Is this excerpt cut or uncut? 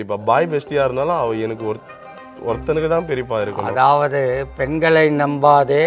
uncut